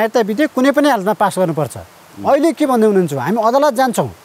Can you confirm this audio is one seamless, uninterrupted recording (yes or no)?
yes